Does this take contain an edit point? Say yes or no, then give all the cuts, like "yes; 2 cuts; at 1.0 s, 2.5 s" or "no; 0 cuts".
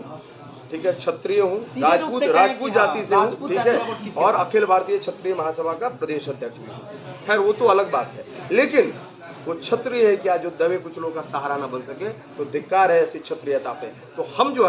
no; 0 cuts